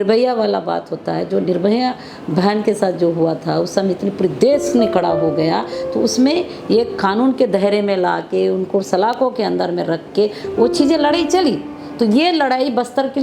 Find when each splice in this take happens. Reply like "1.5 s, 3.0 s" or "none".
none